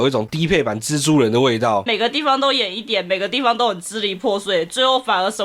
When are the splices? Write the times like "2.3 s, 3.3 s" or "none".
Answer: 1.9 s